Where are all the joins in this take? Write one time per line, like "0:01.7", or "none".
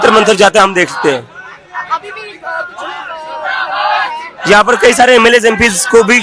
none